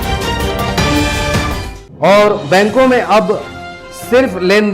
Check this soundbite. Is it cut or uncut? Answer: uncut